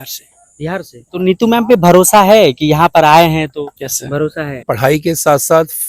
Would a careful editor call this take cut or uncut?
cut